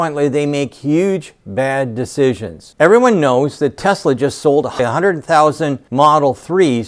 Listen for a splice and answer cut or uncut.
cut